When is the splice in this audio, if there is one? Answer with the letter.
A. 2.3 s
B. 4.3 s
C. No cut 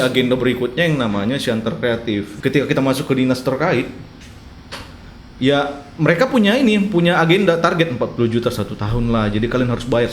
A